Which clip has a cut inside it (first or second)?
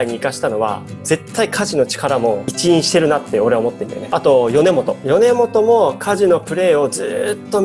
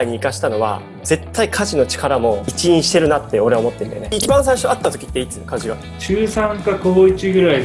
second